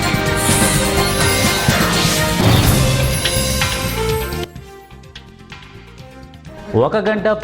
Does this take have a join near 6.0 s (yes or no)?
no